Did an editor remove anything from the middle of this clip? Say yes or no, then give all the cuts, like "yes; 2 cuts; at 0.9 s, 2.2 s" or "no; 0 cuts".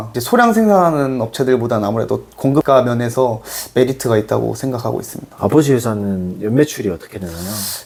no; 0 cuts